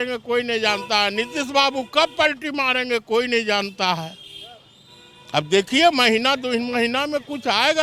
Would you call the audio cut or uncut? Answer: uncut